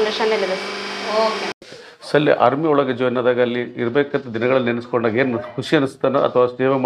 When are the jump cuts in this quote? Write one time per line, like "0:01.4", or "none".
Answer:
0:01.5